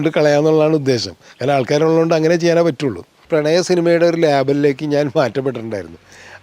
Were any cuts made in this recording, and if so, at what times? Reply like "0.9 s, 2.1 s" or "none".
3.2 s

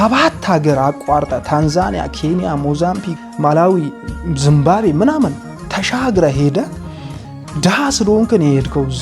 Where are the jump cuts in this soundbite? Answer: 3.1 s

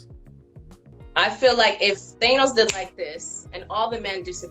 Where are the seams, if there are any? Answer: 0.9 s

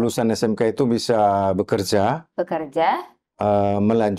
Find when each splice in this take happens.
none

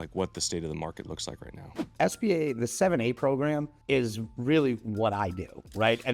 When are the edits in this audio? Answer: 1.7 s, 3.7 s

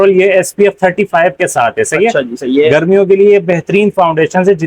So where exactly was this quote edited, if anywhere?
none

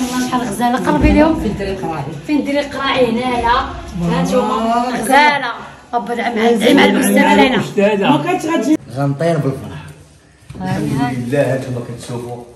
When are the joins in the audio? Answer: 8.8 s

